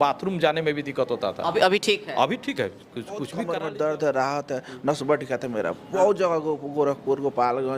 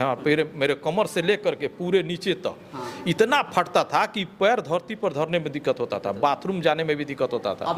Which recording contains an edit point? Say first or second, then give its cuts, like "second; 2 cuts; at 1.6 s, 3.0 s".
first; 1 cut; at 3.3 s